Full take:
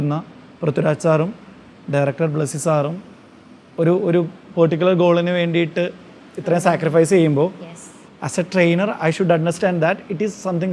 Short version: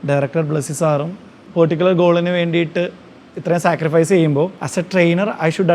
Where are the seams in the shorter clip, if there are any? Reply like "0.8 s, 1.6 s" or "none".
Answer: 1.4 s, 4.6 s